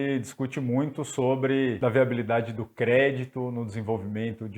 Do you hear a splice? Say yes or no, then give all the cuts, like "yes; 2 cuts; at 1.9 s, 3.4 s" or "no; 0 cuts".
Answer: yes; 1 cut; at 1.8 s